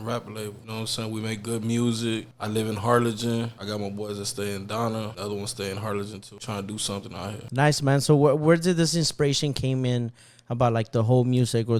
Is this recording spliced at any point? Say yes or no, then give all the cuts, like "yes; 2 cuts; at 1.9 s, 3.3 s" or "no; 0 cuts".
no; 0 cuts